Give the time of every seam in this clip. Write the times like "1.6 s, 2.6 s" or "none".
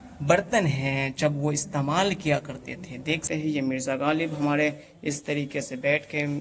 3.2 s